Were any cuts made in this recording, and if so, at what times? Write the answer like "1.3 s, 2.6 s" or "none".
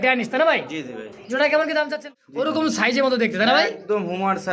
2.0 s